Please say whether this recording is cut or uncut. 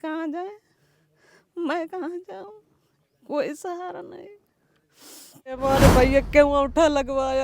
cut